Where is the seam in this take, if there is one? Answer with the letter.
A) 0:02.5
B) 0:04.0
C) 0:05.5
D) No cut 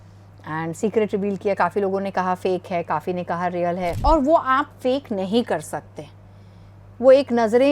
B